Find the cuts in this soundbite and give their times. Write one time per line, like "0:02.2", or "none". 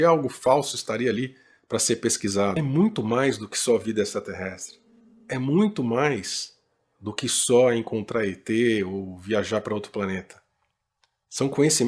0:02.6